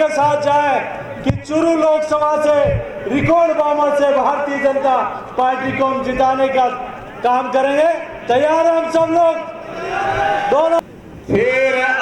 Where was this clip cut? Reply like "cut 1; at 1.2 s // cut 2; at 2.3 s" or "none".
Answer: cut 1; at 10.8 s